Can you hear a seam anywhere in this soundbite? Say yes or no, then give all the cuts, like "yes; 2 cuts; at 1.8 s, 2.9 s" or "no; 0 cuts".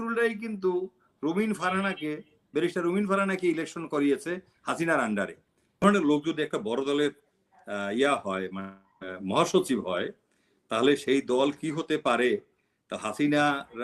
yes; 1 cut; at 5.8 s